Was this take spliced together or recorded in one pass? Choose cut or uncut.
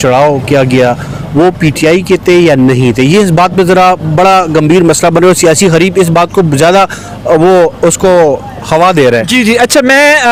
uncut